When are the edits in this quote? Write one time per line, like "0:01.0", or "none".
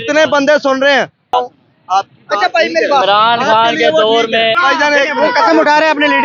0:01.3
0:04.6

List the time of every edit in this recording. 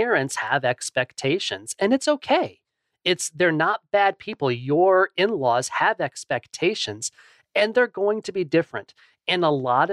none

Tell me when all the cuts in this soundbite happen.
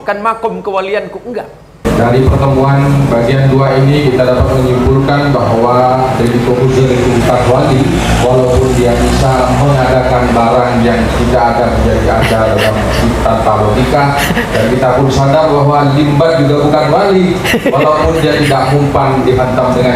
0:01.9

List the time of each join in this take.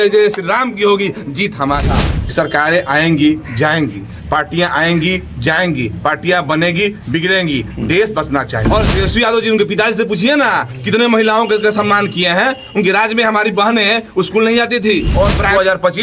0:02.2
0:08.6
0:15.1

